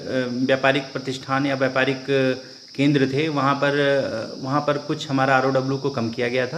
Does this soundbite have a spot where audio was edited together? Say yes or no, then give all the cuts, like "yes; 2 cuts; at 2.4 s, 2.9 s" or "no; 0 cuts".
no; 0 cuts